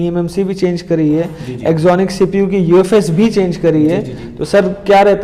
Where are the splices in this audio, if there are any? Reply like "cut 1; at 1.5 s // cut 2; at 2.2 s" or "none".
none